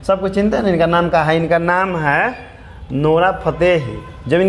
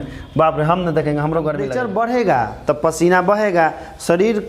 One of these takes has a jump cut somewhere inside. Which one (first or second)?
second